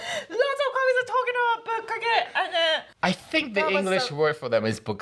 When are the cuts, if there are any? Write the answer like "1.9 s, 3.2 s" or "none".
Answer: 2.9 s